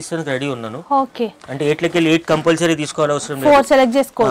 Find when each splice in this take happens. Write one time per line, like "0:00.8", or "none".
none